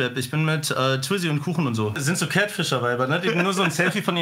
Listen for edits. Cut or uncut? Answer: cut